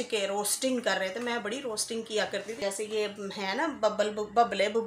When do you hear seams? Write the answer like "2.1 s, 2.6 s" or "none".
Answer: 2.5 s